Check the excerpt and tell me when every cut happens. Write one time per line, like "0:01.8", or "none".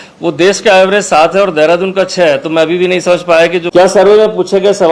0:03.7